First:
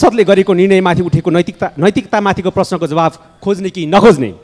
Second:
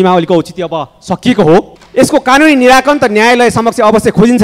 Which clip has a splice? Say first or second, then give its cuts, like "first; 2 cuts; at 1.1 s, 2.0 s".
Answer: second; 1 cut; at 1.8 s